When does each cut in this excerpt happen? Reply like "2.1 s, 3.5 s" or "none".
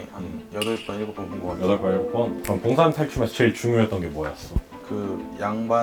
2.4 s